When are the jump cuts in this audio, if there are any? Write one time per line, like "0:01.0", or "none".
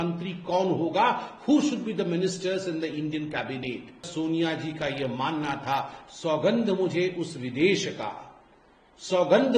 0:04.1